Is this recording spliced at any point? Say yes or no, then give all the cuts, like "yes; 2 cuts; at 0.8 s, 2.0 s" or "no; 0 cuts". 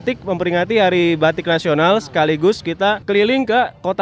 yes; 1 cut; at 3.0 s